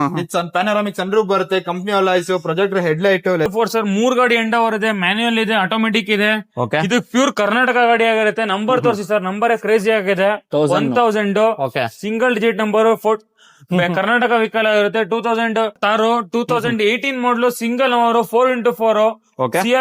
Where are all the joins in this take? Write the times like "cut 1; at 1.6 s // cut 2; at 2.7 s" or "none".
cut 1; at 3.5 s // cut 2; at 15.8 s